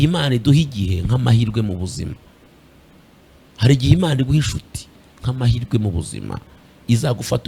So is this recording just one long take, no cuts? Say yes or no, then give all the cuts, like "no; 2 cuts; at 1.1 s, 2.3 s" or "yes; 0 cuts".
yes; 0 cuts